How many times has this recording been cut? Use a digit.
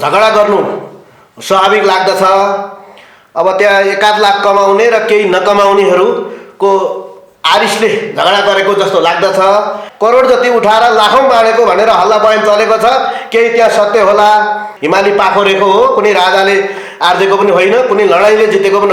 2